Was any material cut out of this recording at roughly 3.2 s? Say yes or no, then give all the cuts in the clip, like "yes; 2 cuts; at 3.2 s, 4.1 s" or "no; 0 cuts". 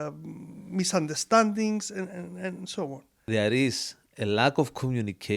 yes; 1 cut; at 3.2 s